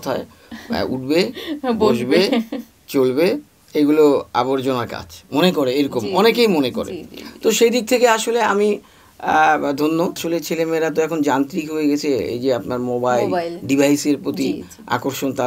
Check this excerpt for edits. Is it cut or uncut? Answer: cut